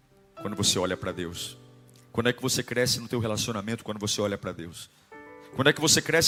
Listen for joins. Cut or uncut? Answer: uncut